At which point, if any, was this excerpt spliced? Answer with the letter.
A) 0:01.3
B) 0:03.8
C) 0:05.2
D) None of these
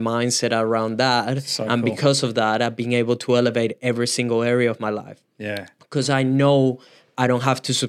D